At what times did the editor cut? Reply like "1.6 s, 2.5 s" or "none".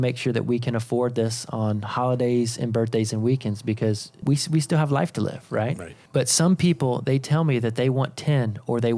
4.1 s, 5.9 s